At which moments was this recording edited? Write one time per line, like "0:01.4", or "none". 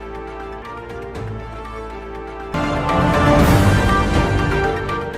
0:02.5

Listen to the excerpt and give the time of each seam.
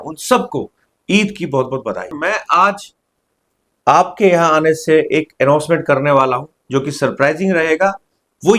0:02.2

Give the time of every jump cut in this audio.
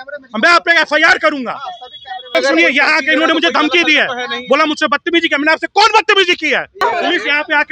0:02.3
0:06.8

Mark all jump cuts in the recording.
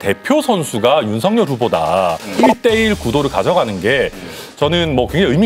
0:02.4

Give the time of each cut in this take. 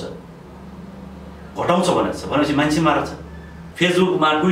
0:03.6

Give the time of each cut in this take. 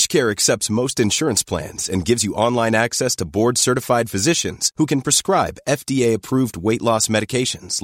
none

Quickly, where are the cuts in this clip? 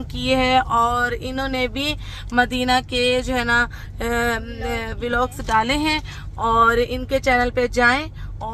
none

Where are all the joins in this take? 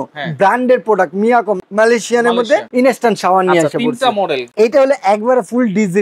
0:01.6
0:02.7
0:04.5

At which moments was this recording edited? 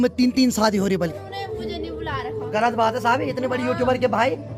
0:01.1

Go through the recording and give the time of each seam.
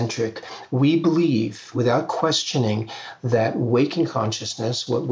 0:01.7

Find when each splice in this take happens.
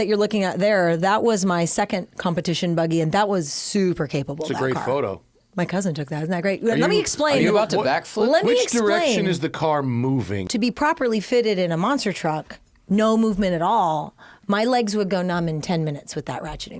0:10.4

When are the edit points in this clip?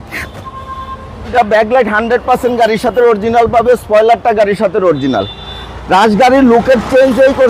0:01.3

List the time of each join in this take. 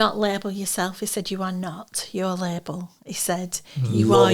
none

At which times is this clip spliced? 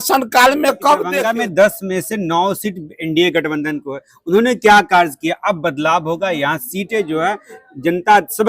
0:01.2

